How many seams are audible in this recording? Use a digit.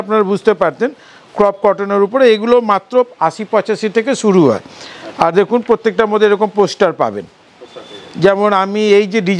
0